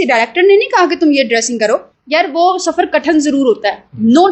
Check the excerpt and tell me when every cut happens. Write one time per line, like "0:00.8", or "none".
0:02.0